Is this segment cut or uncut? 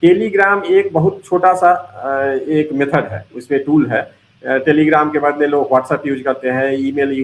uncut